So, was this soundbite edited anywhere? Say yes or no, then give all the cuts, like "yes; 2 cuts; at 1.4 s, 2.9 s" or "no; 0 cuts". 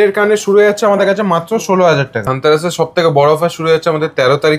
yes; 1 cut; at 2.2 s